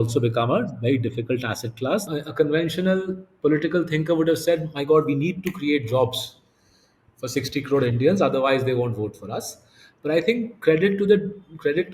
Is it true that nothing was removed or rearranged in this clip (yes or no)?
no